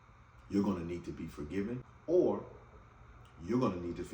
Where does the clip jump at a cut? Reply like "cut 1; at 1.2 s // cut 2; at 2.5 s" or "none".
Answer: cut 1; at 1.9 s